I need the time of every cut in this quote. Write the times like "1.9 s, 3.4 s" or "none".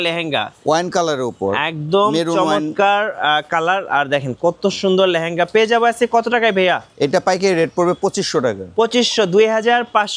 none